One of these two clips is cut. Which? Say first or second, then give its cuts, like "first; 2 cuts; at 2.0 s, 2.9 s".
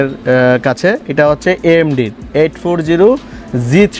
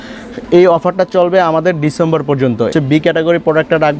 second; 1 cut; at 2.7 s